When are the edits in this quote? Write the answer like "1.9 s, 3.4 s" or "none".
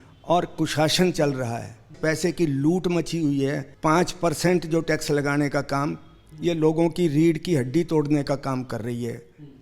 2.0 s, 3.7 s